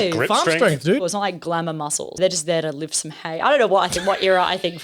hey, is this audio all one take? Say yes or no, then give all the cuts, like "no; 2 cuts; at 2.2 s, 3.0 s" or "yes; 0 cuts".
no; 2 cuts; at 1.0 s, 2.2 s